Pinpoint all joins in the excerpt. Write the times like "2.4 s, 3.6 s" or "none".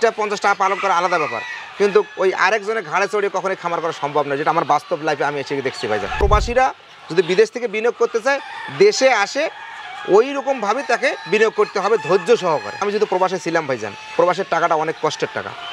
6.2 s, 12.8 s